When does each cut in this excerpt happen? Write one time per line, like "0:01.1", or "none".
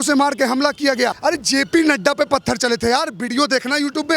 0:01.2